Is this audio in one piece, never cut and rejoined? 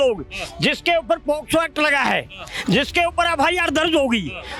yes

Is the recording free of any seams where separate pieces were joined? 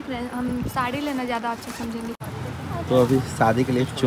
no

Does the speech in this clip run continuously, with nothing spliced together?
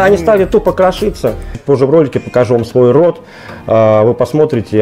no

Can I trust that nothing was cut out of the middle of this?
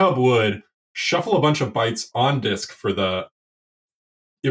yes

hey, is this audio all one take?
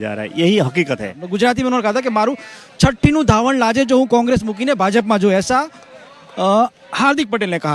no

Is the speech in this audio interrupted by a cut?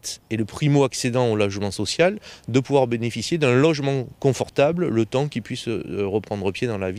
no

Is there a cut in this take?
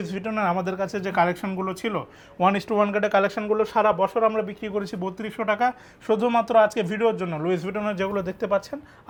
no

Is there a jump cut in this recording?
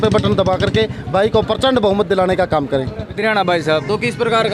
yes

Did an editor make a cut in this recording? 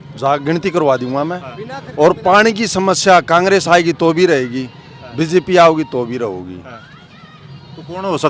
no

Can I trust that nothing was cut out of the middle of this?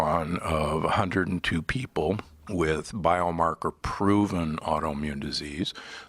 no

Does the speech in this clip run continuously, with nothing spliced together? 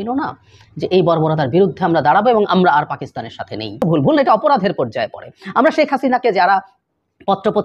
no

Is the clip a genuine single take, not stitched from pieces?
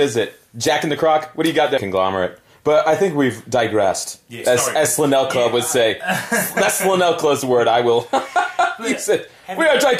yes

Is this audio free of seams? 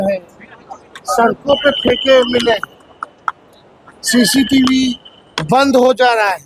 yes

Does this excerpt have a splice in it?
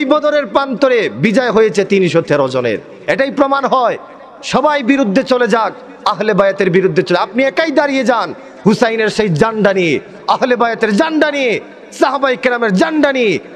no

